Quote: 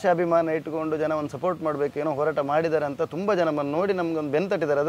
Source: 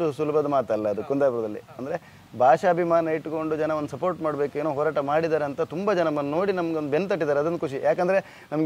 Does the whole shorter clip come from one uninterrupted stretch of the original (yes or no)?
yes